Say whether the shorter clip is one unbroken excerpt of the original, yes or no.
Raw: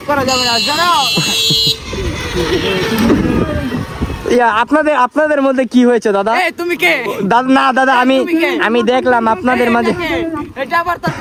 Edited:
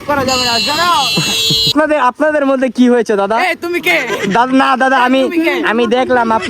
no